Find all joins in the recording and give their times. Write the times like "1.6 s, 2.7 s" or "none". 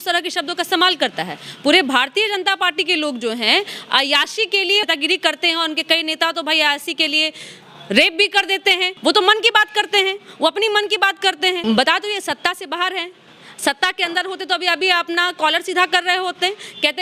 4.8 s, 8.9 s, 11.6 s